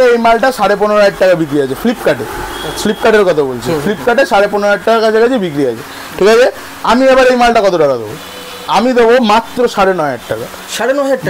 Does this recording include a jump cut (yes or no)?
no